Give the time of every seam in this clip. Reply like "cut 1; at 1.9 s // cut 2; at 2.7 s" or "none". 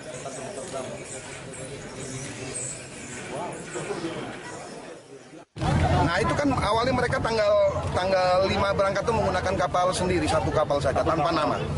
cut 1; at 6.7 s